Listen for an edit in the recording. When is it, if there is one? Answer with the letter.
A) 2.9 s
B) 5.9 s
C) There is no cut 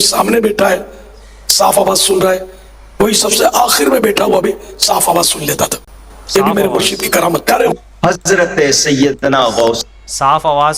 C